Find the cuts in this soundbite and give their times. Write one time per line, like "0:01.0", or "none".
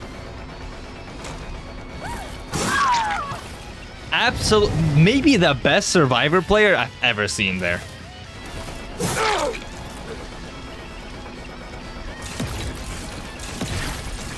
none